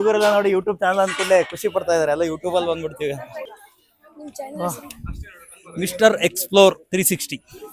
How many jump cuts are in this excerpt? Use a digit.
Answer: 1